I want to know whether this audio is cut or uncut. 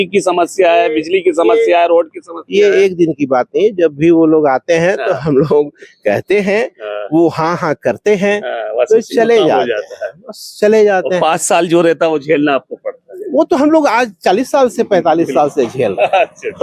uncut